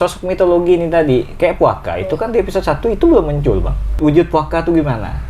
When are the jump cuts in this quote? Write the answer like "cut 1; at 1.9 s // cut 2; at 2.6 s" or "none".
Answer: cut 1; at 3.9 s